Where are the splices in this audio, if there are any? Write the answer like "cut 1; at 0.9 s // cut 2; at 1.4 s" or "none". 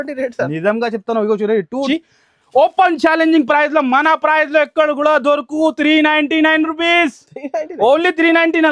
cut 1; at 1.8 s